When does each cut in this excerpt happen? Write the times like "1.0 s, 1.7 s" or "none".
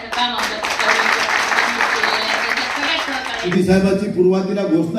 3.5 s